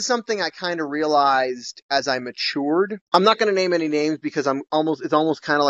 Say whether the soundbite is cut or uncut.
uncut